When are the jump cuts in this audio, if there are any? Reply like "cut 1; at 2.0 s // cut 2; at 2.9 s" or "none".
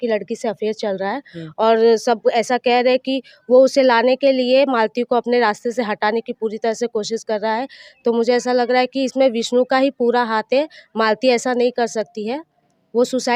none